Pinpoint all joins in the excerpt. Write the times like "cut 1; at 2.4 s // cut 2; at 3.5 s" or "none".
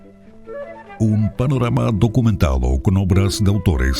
cut 1; at 1.0 s